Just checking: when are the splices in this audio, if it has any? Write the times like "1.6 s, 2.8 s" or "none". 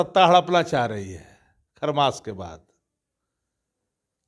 none

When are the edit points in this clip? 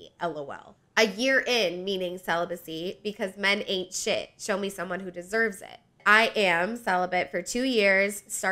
6.0 s

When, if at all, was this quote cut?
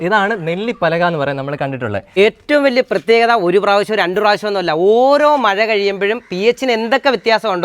2.2 s

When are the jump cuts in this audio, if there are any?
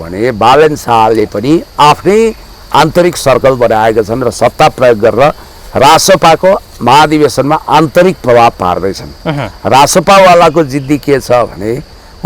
none

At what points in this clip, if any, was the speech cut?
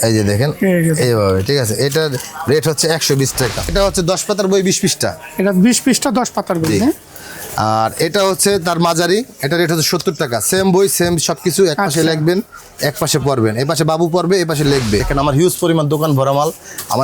3.7 s, 15.1 s

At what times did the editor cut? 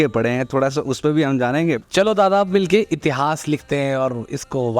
1.8 s

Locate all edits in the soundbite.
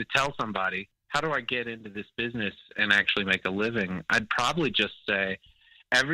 0.9 s

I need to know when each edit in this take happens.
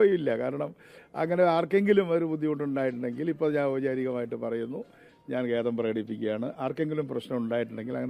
none

